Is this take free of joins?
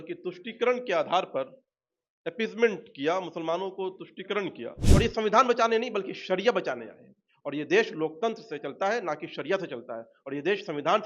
no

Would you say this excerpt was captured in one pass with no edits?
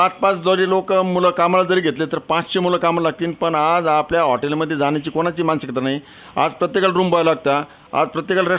yes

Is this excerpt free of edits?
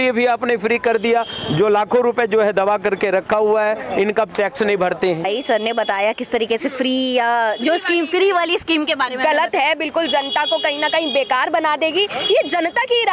yes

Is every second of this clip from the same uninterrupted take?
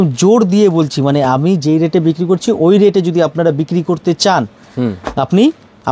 yes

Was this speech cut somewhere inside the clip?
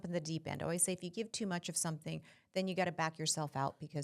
no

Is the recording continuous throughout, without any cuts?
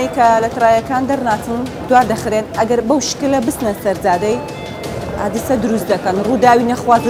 yes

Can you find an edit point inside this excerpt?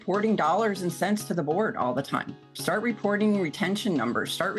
no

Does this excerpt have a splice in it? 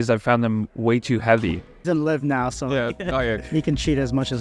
yes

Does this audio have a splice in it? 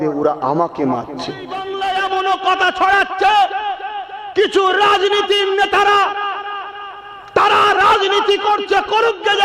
yes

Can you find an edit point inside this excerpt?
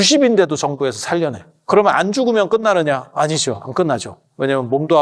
yes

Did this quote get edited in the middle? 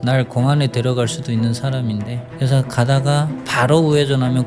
yes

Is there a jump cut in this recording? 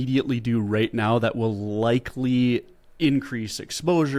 no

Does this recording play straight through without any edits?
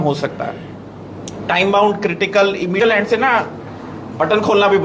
no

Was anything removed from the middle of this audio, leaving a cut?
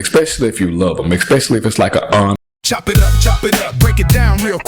yes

